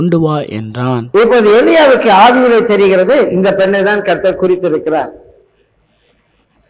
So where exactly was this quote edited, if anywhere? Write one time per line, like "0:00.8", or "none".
none